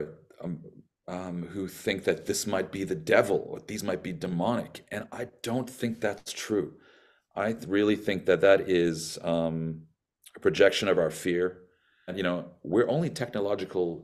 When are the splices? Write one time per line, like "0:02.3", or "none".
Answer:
0:12.1